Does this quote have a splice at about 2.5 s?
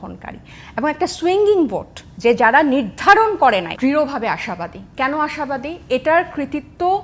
no; 1 cut; at 3.7 s

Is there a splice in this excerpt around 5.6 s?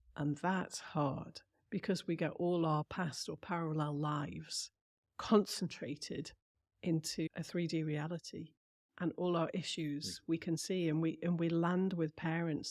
no; 1 cut; at 7.3 s

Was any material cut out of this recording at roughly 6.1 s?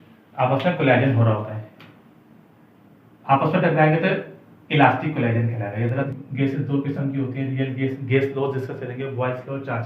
yes; 1 cut; at 6.1 s

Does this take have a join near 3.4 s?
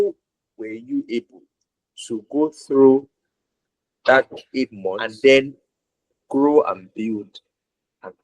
no; 1 cut; at 5.1 s

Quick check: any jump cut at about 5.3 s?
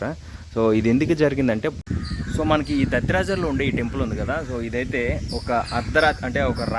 no; 1 cut; at 1.8 s

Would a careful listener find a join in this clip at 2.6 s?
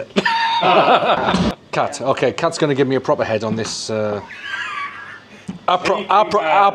no; 1 cut; at 1.3 s

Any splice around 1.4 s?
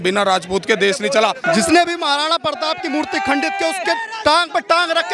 yes; 1 cut; at 1.4 s

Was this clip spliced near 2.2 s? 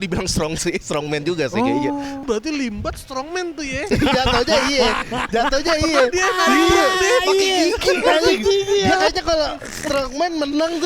yes; 1 cut; at 2.2 s

